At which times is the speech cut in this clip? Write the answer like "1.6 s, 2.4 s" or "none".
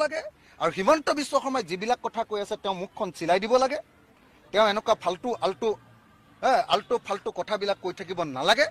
none